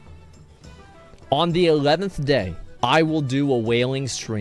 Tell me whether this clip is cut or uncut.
cut